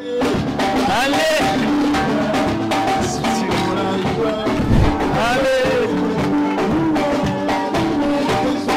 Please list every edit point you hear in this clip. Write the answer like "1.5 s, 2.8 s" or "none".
none

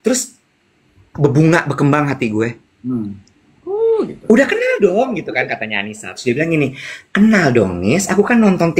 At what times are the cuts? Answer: none

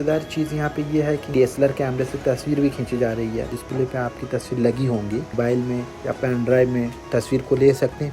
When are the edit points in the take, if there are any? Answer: 1.2 s, 3.6 s, 5.3 s

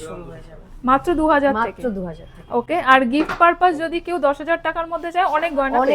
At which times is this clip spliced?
none

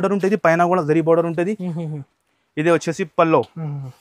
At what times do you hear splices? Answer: 2.0 s

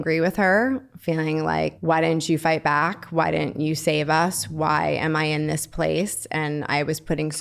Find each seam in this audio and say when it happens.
1.8 s

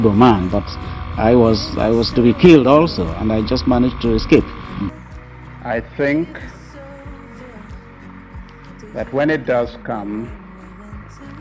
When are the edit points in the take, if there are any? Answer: 4.9 s

